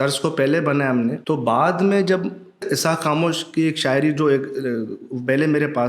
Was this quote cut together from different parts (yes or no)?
yes